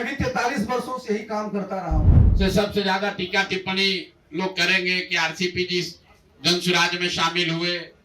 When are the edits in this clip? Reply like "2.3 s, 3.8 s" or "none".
2.2 s